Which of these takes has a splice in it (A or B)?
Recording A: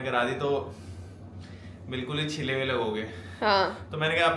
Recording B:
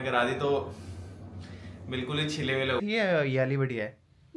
B